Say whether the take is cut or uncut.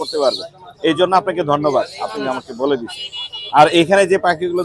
uncut